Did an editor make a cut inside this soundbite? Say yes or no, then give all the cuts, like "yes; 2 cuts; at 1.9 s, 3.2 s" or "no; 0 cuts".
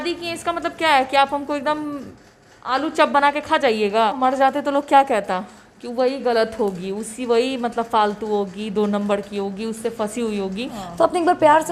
yes; 2 cuts; at 4.1 s, 10.8 s